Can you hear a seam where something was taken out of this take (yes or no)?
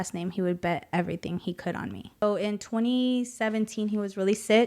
yes